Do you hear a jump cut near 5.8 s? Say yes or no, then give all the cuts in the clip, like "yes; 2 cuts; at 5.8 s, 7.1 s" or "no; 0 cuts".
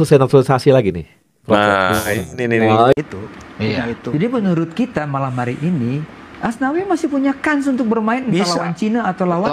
no; 1 cut; at 2.9 s